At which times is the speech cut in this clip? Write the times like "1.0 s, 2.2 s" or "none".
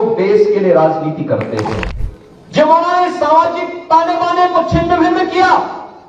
1.9 s